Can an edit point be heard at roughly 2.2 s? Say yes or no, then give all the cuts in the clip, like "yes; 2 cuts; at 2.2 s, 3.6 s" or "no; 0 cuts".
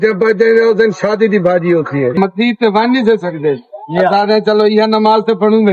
yes; 1 cut; at 2.2 s